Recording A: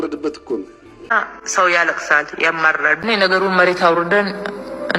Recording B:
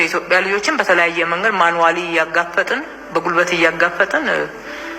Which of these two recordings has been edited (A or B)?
A